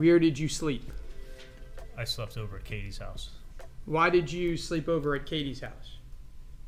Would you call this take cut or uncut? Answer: uncut